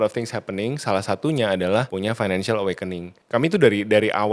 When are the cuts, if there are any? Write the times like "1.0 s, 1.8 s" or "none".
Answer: 1.9 s, 3.1 s